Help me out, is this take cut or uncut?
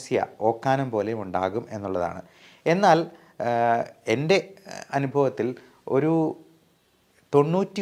uncut